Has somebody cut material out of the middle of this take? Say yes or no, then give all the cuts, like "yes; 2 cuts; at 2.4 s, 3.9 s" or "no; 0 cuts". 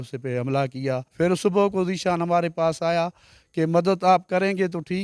yes; 1 cut; at 1.1 s